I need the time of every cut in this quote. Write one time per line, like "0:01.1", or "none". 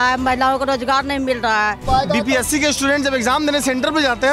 0:01.9